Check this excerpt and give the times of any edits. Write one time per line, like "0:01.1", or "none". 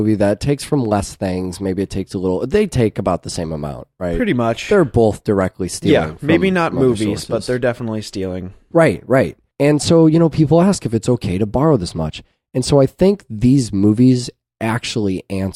0:07.3